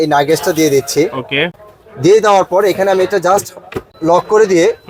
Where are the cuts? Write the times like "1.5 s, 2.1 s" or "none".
none